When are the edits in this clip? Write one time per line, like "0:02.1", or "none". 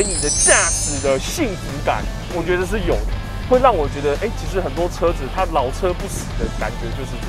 none